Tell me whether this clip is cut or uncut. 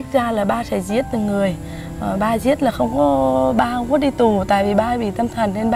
uncut